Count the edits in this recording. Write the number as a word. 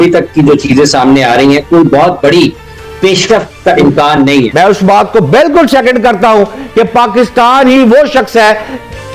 one